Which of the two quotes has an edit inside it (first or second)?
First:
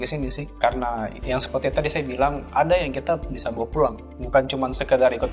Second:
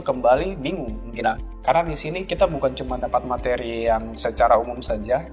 second